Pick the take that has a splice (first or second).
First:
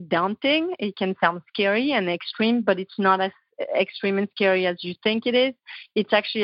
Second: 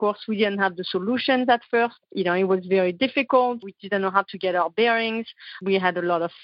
second